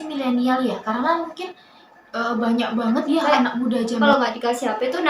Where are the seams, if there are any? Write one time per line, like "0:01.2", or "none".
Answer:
0:04.0